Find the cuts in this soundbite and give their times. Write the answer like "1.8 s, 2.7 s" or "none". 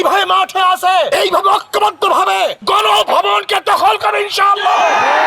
1.1 s, 2.6 s